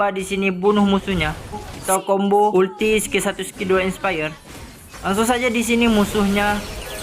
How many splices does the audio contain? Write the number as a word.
one